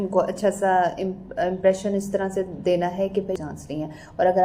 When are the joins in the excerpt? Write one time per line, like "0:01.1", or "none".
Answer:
0:03.3